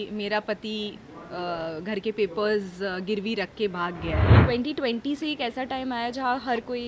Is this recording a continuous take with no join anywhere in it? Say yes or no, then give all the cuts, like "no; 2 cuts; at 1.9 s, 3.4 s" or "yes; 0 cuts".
no; 1 cut; at 4.3 s